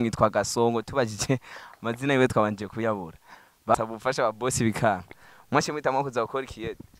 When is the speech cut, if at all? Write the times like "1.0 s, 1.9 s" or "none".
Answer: 3.7 s